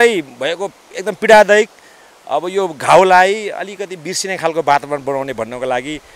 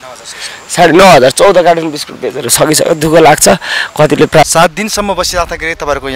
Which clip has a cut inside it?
second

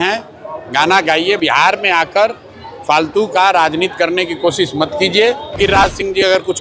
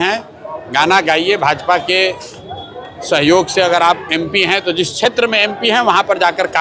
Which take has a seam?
first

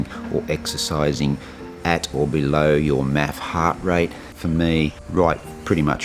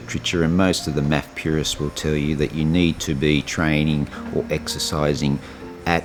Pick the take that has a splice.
first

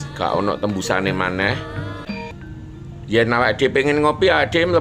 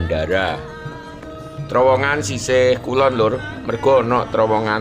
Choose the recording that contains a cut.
first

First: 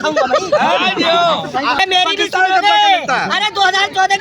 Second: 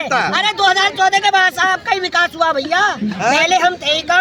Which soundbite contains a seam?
first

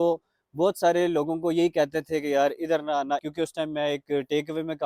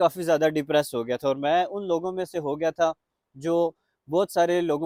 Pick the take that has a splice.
first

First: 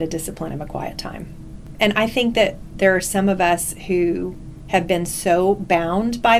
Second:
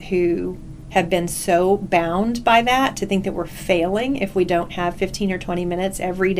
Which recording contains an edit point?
first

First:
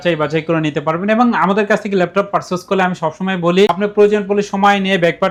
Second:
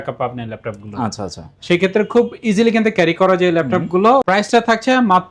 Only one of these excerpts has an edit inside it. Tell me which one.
second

